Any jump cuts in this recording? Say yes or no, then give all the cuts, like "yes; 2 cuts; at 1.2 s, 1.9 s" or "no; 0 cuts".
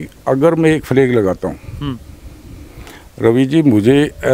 no; 0 cuts